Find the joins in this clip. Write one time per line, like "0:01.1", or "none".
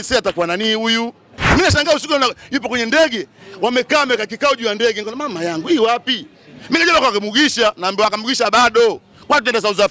0:01.3